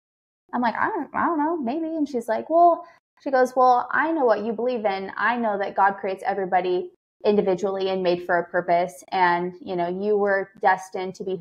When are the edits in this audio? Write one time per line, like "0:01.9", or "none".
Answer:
none